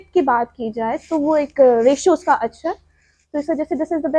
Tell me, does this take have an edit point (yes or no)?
no